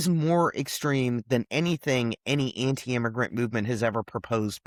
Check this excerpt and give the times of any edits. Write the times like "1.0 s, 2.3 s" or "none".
none